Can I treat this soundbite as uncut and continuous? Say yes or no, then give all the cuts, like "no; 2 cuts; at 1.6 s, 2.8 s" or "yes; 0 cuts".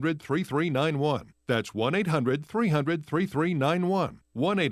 yes; 0 cuts